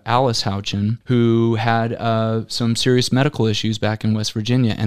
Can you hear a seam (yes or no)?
yes